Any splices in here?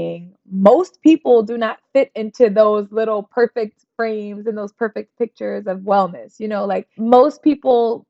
yes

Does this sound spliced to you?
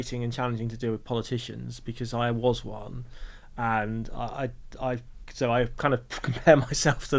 no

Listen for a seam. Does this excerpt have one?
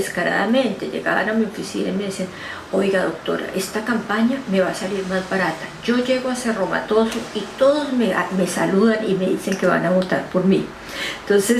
yes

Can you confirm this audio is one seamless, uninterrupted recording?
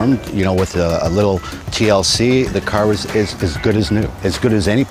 yes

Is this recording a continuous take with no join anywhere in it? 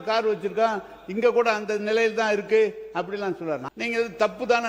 no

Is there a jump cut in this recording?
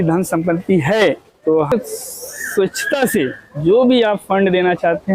yes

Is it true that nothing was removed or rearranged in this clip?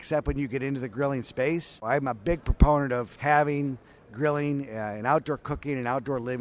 no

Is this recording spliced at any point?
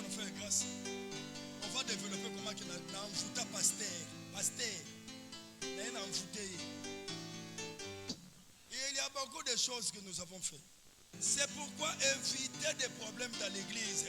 yes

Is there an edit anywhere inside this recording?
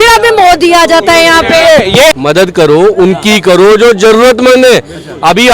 yes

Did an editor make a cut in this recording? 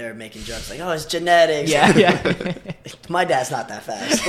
no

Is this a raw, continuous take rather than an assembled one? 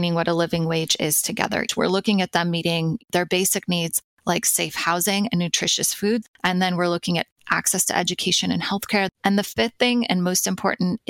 no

